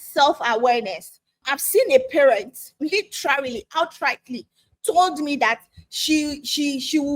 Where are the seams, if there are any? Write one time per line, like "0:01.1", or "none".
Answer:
0:01.4